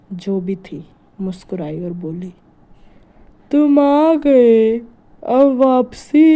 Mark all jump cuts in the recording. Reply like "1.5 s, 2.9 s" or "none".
none